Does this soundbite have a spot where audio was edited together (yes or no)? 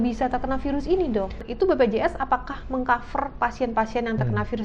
yes